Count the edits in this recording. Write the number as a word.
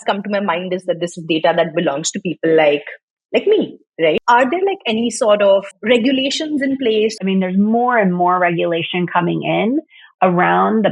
three